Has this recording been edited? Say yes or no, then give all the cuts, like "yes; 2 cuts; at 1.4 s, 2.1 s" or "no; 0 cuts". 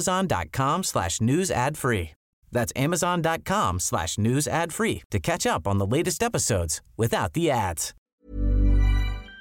yes; 1 cut; at 8.1 s